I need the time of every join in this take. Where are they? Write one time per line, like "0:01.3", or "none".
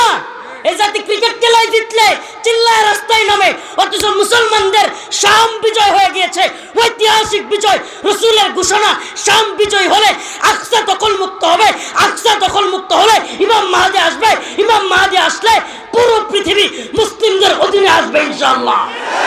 none